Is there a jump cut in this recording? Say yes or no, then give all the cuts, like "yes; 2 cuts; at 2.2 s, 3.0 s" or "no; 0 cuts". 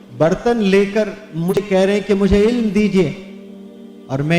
yes; 1 cut; at 1.6 s